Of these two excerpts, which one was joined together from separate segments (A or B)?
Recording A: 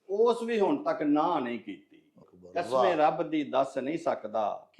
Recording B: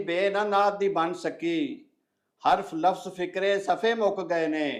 A